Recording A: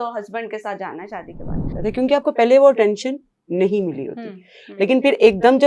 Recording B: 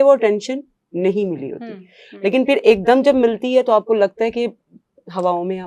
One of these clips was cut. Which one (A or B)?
A